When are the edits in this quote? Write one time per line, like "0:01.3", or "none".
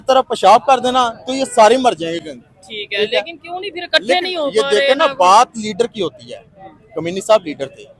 none